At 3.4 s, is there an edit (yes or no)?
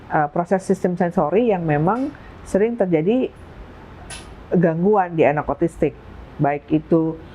no